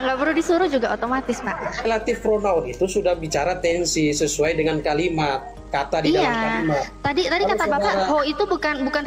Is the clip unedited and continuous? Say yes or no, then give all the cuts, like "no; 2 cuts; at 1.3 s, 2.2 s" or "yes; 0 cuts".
no; 1 cut; at 1.8 s